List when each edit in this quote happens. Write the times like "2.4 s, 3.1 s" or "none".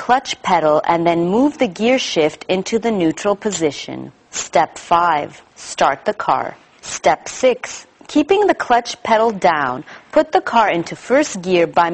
none